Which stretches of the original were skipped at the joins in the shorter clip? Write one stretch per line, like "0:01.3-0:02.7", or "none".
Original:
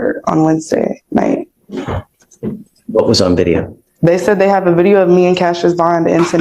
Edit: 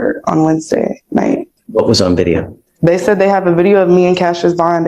0:01.6-0:02.8